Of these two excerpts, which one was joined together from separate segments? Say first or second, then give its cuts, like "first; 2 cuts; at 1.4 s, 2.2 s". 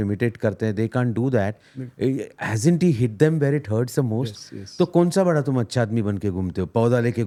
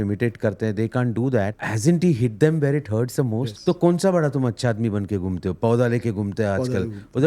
second; 2 cuts; at 1.6 s, 3.5 s